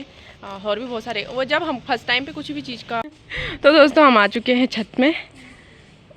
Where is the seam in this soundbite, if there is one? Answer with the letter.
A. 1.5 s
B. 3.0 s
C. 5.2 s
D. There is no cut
B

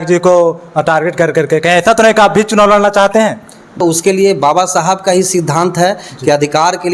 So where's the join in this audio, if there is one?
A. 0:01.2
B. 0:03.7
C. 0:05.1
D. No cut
B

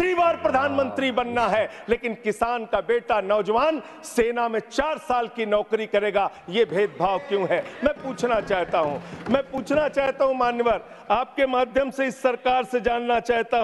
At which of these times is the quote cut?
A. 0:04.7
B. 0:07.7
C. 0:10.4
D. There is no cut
D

